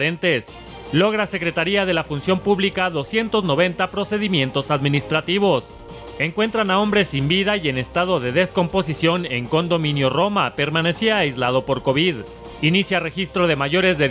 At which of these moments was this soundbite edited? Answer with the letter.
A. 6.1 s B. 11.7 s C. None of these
A